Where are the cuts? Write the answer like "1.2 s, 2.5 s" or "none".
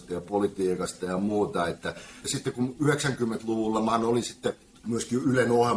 2.2 s, 4.7 s